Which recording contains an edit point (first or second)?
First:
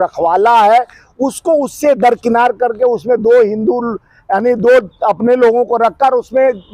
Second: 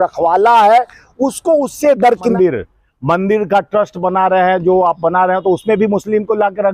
second